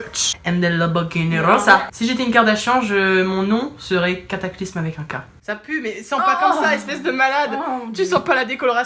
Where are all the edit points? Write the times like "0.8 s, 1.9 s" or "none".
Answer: 1.9 s, 5.4 s